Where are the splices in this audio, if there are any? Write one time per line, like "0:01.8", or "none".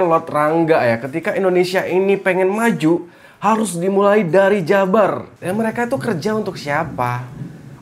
0:05.3